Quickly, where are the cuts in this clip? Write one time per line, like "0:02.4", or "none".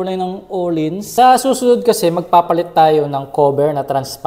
0:01.0